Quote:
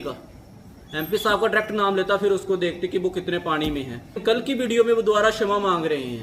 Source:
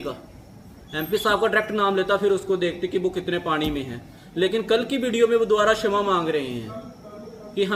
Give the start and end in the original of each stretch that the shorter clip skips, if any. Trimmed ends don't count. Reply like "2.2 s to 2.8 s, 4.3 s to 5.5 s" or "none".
4.2 s to 4.6 s